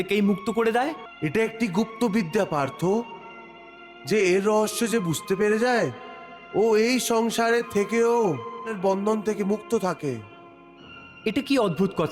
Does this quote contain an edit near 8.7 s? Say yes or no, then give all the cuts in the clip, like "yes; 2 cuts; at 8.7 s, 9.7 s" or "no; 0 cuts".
yes; 2 cuts; at 1.1 s, 8.7 s